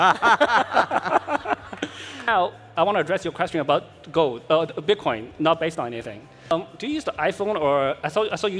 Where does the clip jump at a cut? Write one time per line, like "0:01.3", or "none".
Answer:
0:02.3
0:06.5